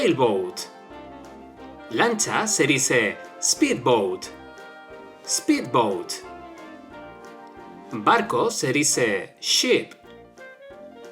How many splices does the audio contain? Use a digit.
2